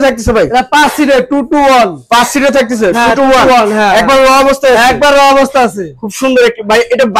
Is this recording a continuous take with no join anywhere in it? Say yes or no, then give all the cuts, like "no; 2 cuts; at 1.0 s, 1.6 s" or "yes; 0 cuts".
yes; 0 cuts